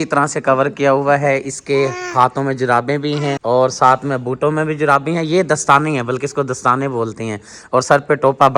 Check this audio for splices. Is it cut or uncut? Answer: uncut